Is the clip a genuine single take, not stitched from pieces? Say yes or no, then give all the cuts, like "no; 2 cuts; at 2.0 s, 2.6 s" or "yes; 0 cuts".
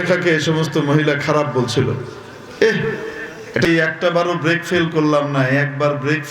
no; 1 cut; at 3.7 s